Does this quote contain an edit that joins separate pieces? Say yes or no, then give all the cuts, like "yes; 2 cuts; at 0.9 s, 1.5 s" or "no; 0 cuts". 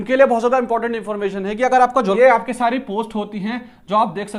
yes; 1 cut; at 2.1 s